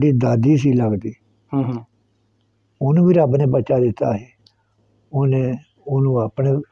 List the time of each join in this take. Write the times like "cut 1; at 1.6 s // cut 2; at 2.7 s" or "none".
none